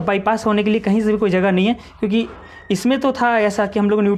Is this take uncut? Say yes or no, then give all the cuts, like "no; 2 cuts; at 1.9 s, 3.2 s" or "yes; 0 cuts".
yes; 0 cuts